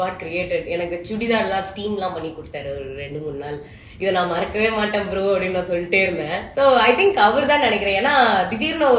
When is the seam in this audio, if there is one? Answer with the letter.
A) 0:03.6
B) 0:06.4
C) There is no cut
B